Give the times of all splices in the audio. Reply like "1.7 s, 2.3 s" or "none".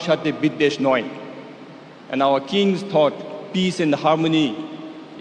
none